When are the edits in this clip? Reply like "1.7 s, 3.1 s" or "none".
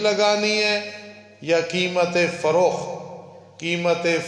none